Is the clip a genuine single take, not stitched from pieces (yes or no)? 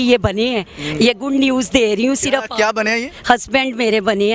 yes